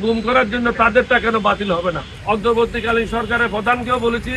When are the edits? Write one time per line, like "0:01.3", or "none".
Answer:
0:02.1